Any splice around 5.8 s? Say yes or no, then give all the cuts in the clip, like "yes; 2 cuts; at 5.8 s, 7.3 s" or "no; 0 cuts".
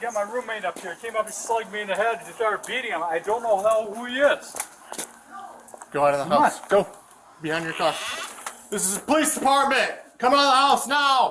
no; 1 cut; at 8.5 s